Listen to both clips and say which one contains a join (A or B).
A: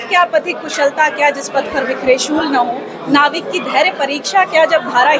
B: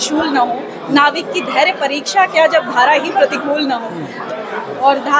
B